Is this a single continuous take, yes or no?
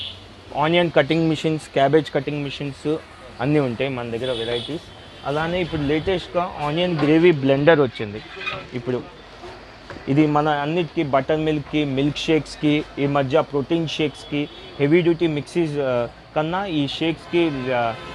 yes